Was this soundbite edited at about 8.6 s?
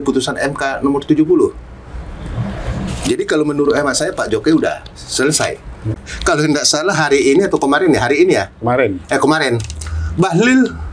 no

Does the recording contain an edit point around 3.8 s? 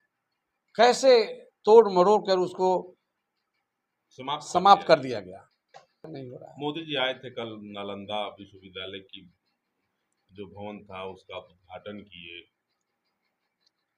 no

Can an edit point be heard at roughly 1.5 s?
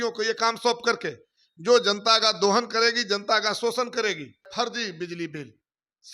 no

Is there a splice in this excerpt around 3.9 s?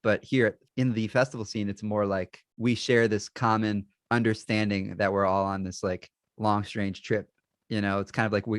yes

